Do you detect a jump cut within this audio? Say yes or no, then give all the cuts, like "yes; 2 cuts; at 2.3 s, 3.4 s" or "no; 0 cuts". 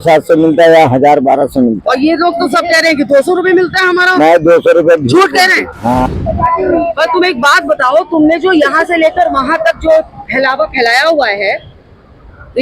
yes; 1 cut; at 6.0 s